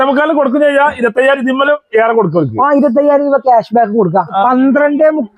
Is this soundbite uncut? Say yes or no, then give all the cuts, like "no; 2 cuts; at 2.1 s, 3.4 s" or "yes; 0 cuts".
no; 1 cut; at 4.4 s